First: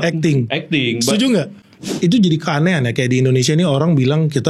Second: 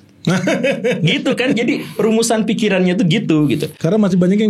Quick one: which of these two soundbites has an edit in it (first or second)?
first